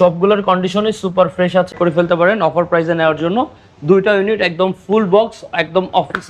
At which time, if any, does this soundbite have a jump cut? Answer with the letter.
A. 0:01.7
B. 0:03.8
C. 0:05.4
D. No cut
A